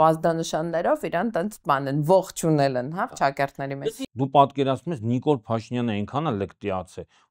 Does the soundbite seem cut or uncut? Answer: cut